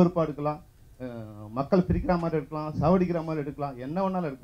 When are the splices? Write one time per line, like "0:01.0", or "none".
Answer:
none